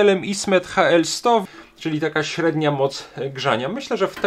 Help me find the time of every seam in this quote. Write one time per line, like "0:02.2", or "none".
0:01.5